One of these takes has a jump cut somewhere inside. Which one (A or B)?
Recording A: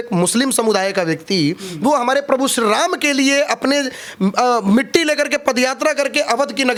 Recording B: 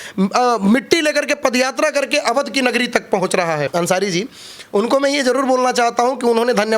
B